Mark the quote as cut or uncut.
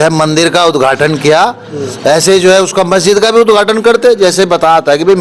uncut